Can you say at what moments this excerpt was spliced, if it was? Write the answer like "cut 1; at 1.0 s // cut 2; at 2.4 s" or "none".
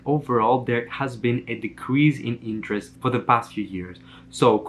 none